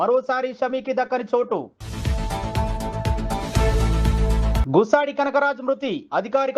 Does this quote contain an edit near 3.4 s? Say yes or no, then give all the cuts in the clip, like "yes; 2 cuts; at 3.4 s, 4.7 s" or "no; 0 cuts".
no; 2 cuts; at 1.8 s, 4.6 s